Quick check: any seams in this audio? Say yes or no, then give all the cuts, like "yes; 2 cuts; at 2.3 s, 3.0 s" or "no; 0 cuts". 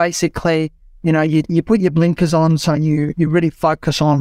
no; 0 cuts